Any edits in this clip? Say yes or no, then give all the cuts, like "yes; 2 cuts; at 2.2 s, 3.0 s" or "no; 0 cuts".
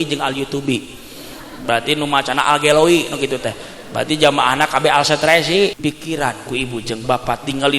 yes; 1 cut; at 5.8 s